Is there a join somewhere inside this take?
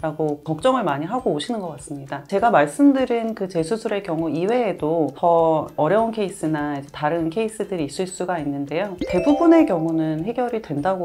no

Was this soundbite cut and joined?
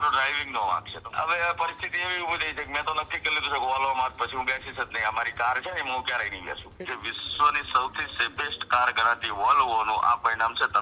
yes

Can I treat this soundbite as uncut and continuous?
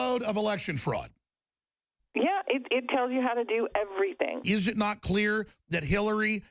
no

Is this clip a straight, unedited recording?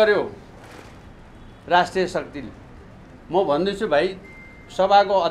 yes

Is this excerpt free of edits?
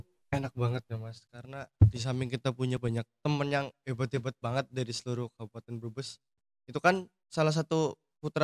yes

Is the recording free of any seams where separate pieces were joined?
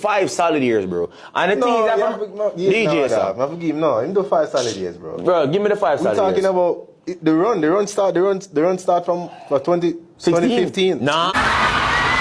no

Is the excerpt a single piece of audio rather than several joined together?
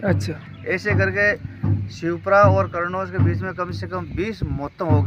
yes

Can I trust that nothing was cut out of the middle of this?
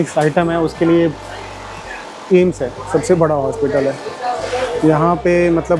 yes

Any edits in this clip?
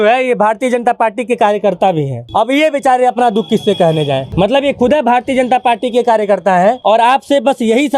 yes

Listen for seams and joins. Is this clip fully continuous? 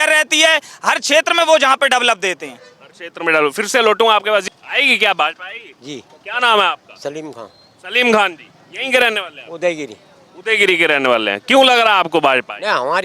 yes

